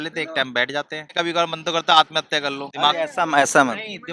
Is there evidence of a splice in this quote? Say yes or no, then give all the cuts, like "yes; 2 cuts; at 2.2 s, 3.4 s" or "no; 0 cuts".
yes; 2 cuts; at 1.1 s, 2.6 s